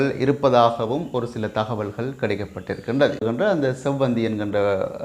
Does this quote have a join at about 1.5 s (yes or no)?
no